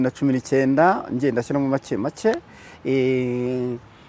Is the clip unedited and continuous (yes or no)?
yes